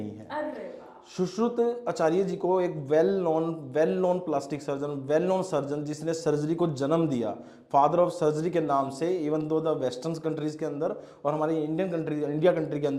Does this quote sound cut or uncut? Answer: uncut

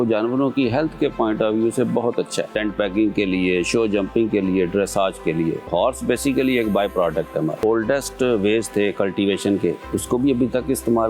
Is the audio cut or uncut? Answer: cut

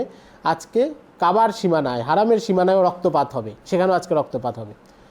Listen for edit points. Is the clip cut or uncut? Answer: uncut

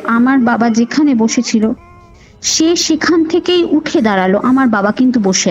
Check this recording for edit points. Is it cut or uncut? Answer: uncut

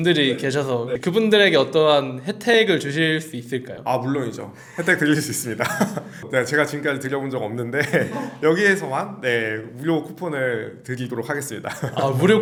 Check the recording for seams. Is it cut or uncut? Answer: uncut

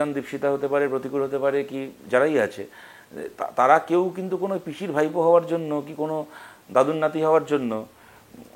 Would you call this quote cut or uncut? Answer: uncut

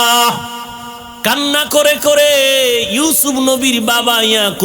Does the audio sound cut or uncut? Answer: cut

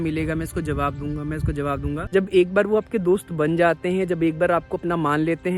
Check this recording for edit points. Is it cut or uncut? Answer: cut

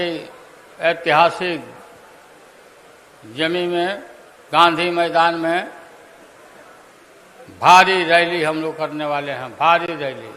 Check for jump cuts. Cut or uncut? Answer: uncut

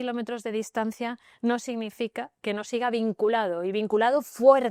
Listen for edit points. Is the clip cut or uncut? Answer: uncut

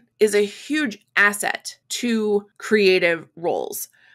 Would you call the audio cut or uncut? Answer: uncut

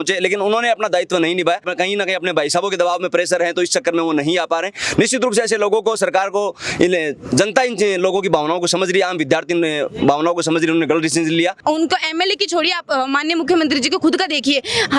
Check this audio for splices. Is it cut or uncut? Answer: cut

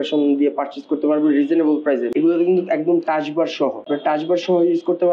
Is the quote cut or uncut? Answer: cut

